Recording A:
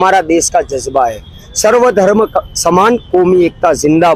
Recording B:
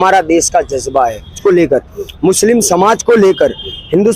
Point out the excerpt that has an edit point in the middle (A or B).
B